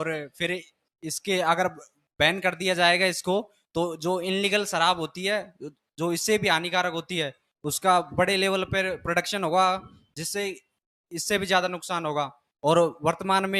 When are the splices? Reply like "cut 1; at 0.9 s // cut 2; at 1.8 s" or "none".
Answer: none